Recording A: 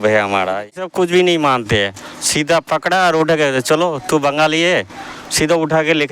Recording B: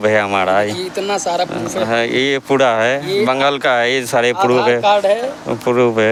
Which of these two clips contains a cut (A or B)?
A